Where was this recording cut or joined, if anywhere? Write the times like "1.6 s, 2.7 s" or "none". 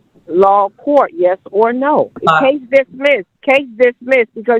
2.2 s, 3.3 s